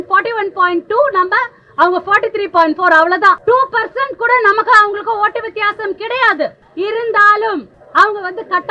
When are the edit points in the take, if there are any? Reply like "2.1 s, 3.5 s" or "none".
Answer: 3.4 s, 6.6 s, 7.8 s